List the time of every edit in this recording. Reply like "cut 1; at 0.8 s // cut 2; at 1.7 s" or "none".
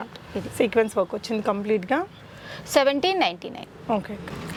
none